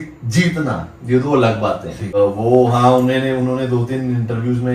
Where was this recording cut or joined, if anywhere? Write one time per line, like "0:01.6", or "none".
0:02.1